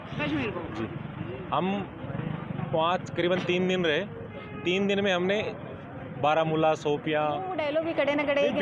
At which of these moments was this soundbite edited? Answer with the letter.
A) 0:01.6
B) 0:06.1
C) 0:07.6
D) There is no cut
C